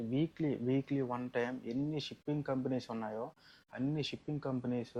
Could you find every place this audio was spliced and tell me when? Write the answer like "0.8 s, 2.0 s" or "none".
none